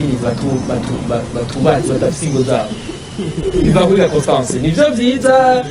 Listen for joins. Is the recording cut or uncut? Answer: uncut